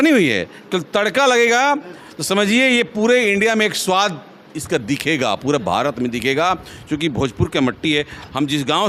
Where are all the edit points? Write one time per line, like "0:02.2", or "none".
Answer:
none